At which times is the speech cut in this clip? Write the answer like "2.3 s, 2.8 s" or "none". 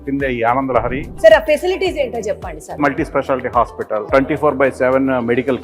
1.0 s, 2.8 s, 4.0 s